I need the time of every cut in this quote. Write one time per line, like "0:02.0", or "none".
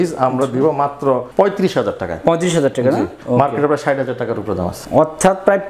0:01.3
0:03.2
0:04.8